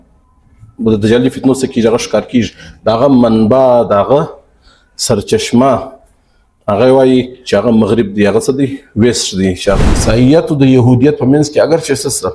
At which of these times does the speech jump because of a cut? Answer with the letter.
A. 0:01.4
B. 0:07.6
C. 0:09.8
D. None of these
C